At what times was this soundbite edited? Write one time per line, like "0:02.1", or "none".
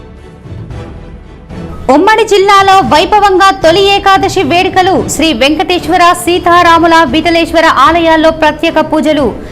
0:01.7